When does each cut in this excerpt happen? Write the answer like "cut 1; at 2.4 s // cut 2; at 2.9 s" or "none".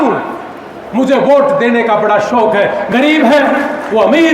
cut 1; at 2.9 s